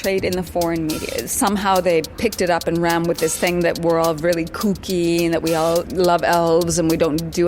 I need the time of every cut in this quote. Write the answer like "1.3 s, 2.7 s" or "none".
1.1 s, 5.9 s

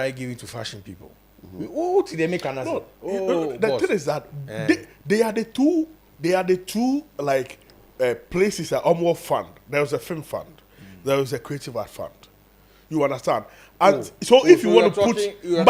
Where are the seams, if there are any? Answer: none

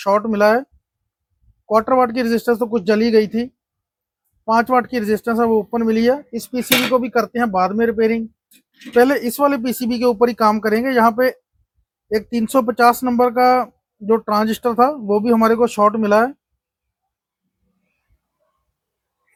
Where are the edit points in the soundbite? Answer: none

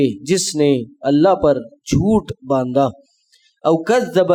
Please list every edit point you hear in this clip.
none

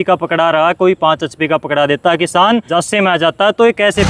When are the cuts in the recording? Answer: 2.7 s

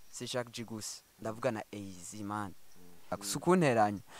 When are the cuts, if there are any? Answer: 3.2 s

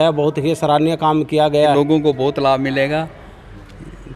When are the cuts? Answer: 1.7 s

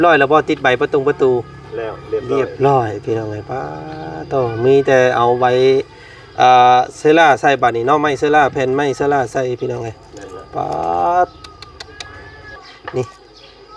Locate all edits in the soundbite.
12.6 s

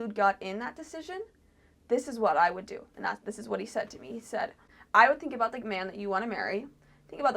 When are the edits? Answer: 4.7 s

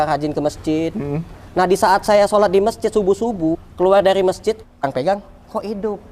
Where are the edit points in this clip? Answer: 3.7 s, 4.8 s

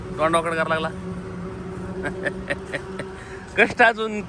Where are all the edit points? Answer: none

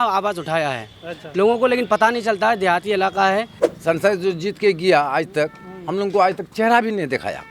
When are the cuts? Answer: 3.6 s

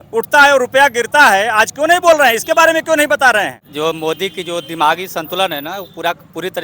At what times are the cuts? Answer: 3.7 s

